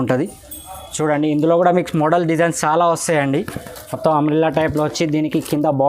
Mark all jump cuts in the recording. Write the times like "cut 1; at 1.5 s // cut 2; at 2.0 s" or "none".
cut 1; at 3.3 s